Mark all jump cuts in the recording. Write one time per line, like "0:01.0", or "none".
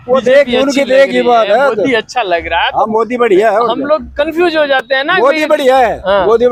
none